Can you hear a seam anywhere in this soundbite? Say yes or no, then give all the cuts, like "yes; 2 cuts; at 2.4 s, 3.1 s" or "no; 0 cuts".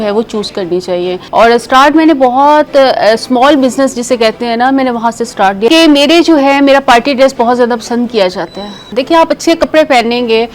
yes; 3 cuts; at 1.2 s, 5.7 s, 8.9 s